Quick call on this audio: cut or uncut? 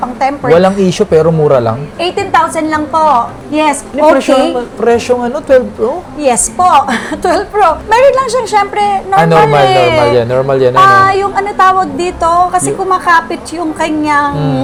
uncut